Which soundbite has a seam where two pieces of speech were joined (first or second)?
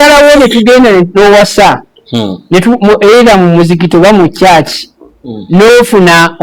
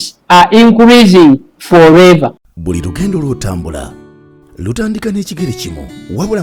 second